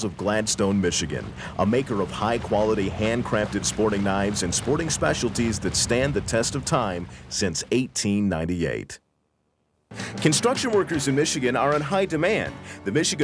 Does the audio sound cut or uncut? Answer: uncut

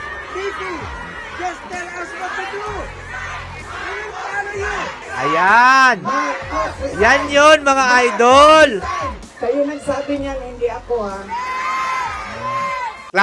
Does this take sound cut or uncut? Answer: cut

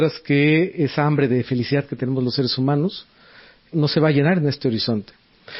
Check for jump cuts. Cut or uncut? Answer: cut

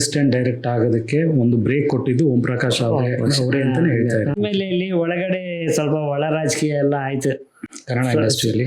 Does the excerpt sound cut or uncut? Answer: cut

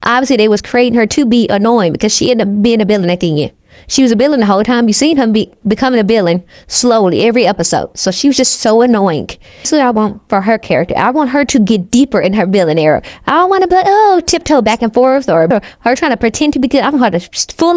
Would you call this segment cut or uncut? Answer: cut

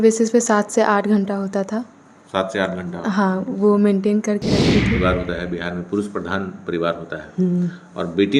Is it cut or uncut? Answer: cut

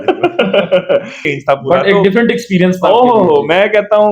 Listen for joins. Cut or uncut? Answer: cut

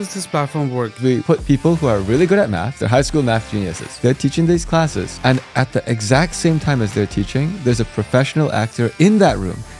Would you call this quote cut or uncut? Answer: cut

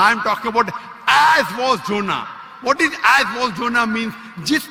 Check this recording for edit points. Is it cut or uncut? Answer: uncut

